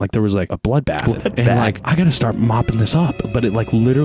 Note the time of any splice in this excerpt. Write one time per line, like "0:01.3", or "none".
0:00.9
0:01.8